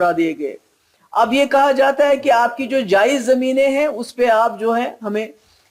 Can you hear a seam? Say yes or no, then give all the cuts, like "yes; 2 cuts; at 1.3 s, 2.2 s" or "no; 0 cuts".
no; 0 cuts